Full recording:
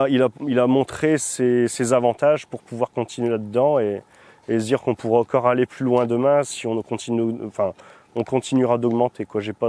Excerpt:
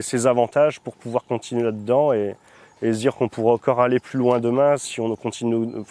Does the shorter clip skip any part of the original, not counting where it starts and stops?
no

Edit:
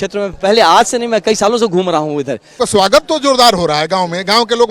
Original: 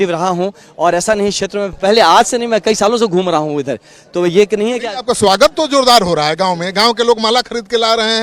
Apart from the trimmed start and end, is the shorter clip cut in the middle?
yes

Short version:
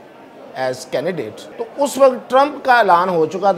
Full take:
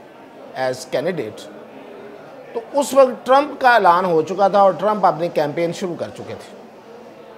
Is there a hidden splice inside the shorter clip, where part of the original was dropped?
yes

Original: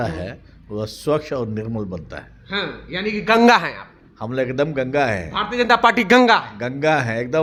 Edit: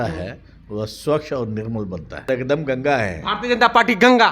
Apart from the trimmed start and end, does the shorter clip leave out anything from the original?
yes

